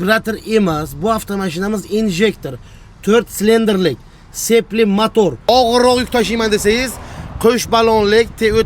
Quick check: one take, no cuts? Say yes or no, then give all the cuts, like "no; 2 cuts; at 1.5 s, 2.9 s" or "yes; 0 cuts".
no; 1 cut; at 5.4 s